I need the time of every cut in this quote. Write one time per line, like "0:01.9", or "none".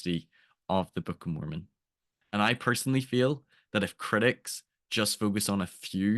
0:01.6